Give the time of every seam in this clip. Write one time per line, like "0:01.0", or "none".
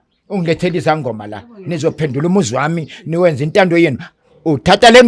none